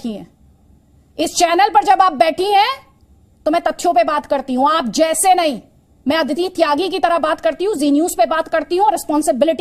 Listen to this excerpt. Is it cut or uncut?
uncut